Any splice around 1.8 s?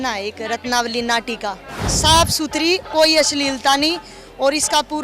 yes; 1 cut; at 1.8 s

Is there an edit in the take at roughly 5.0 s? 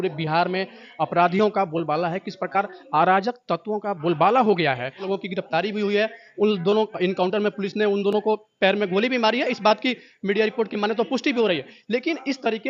yes; 1 cut; at 5.0 s

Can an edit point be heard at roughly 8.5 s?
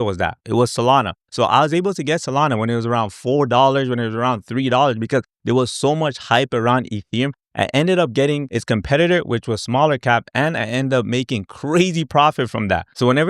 yes; 1 cut; at 8.5 s

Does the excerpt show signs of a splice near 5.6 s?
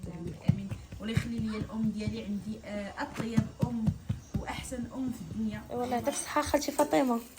yes; 1 cut; at 5.6 s

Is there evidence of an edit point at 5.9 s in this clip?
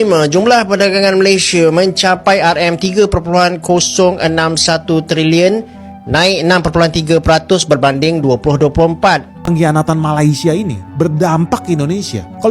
no; 1 cut; at 9.4 s

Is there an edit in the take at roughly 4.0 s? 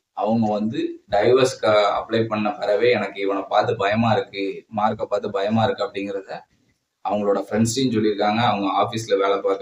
no; 0 cuts

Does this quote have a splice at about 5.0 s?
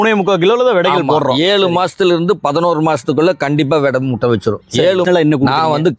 yes; 1 cut; at 5.0 s

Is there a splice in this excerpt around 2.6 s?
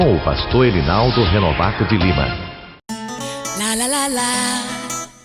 yes; 1 cut; at 2.6 s

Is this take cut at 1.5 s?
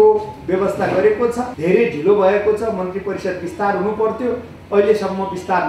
yes; 1 cut; at 1.5 s

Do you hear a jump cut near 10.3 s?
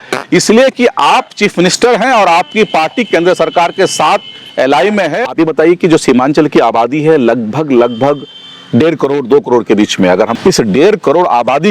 yes; 2 cuts; at 5.2 s, 10.3 s

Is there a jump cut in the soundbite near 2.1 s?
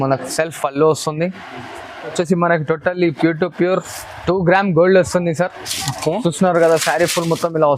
yes; 1 cut; at 2.1 s

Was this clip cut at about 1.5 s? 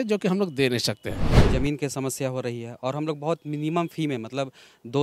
yes; 1 cut; at 1.5 s

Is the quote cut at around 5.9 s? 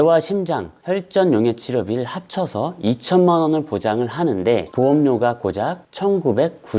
no; 0 cuts

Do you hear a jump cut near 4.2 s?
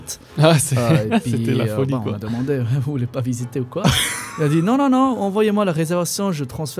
no; 0 cuts

